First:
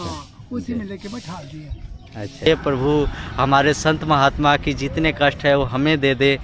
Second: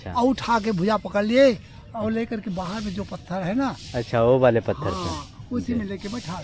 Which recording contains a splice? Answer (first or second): first